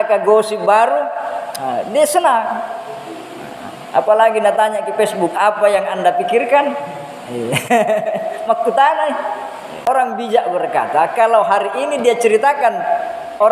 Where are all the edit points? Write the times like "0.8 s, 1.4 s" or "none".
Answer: 9.9 s